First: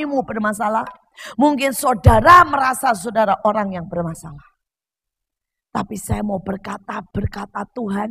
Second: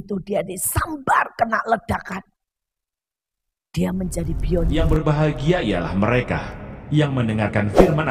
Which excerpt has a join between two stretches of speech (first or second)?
second